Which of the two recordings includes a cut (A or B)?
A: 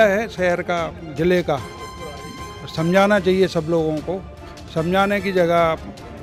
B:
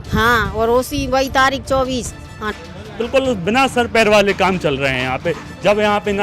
B